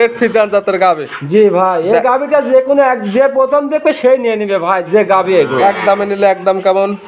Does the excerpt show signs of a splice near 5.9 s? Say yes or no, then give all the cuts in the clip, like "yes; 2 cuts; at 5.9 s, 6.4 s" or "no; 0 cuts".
no; 0 cuts